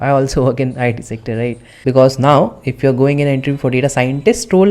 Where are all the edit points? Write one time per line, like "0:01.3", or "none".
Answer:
0:01.8